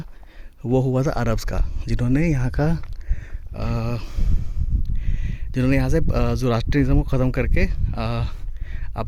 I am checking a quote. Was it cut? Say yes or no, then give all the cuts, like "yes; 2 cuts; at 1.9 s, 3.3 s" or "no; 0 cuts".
no; 0 cuts